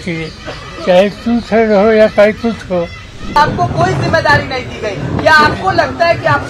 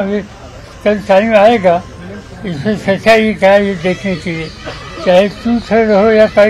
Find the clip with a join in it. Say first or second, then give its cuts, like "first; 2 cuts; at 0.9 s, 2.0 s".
first; 1 cut; at 3.4 s